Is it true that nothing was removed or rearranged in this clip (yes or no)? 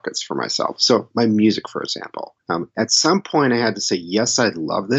no